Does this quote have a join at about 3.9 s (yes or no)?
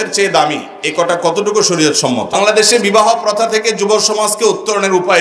no